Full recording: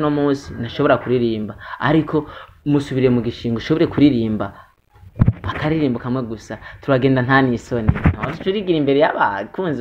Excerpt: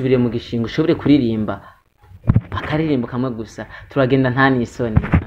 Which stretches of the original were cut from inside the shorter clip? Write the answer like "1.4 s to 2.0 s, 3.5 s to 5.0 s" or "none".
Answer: none